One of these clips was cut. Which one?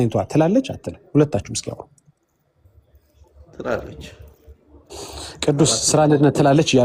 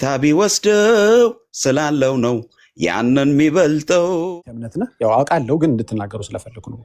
second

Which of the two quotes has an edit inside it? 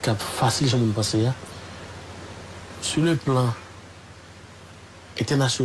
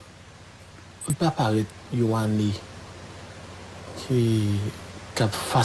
second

